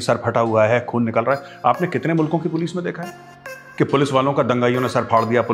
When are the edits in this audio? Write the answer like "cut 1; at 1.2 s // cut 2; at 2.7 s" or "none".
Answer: none